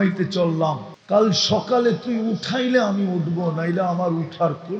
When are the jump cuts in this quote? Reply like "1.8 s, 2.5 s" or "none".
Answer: 0.9 s